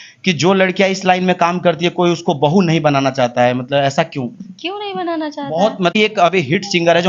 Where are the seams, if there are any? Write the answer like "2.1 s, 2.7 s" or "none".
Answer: 6.0 s